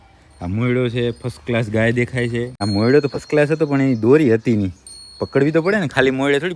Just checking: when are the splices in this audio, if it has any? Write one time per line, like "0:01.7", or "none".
0:02.6

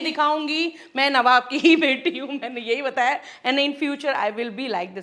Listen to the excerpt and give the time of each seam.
none

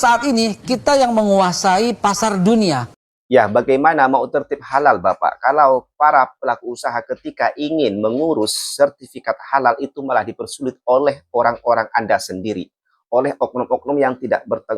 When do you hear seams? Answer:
0:02.9

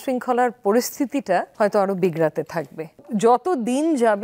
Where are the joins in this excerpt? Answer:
0:01.5
0:03.0

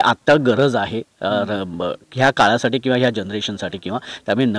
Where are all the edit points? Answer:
none

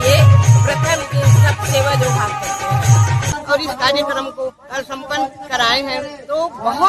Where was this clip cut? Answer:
0:03.3

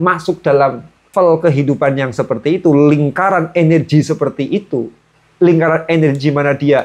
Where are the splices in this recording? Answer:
0:01.1

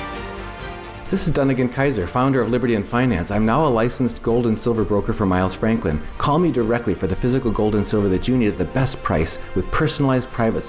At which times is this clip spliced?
0:00.9

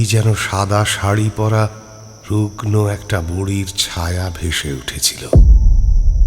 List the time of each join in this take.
0:05.2

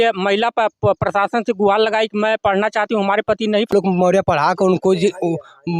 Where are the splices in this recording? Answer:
0:03.7

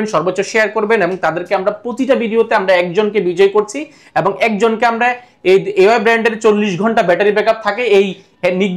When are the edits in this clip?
none

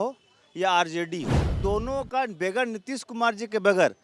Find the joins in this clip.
0:01.5

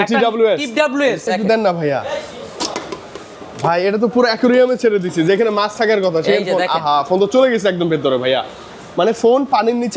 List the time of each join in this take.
0:01.2

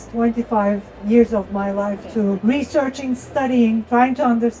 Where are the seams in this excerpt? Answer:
0:02.4
0:03.8

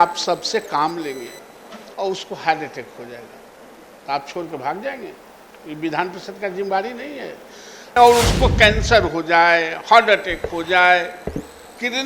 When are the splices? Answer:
0:07.8

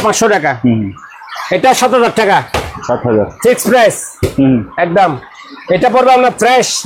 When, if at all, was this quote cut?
none

